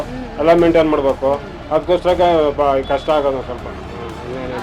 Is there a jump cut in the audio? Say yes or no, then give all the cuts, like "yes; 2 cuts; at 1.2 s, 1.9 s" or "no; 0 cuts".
no; 0 cuts